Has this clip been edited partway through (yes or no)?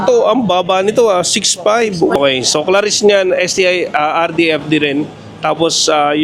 yes